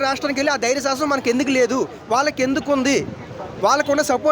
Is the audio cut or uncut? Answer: uncut